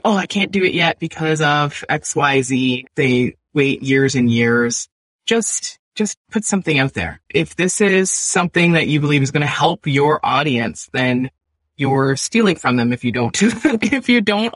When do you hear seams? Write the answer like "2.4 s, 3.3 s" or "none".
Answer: 2.9 s